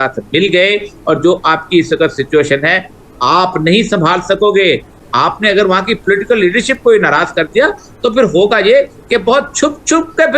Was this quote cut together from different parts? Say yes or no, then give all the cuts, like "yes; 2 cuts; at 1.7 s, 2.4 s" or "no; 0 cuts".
no; 0 cuts